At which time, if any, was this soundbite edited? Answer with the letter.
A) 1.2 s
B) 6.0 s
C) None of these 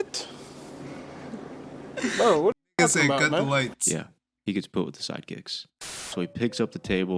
B